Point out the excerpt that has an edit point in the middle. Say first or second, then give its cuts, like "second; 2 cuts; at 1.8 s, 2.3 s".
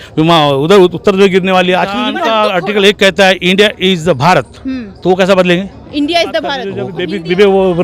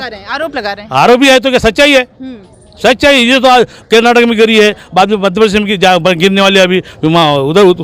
first; 2 cuts; at 2.2 s, 6.9 s